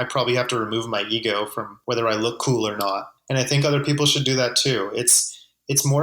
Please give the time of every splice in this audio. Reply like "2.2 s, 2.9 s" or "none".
1.7 s, 3.1 s